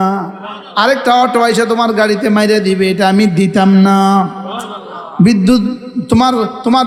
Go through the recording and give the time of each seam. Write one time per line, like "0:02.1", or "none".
none